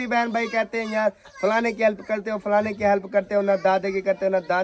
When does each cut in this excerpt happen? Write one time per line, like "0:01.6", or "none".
none